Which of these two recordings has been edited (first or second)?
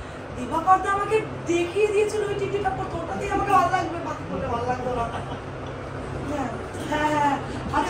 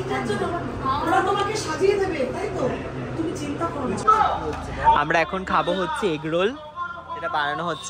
second